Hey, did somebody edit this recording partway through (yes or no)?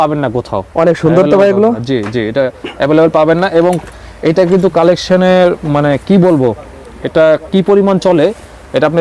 no